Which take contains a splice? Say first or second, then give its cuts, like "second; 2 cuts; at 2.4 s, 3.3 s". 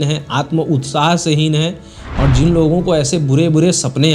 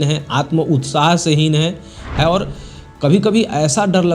second; 1 cut; at 2.1 s